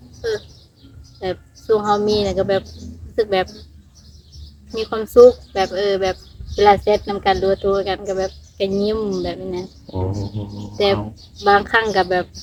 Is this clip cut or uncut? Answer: uncut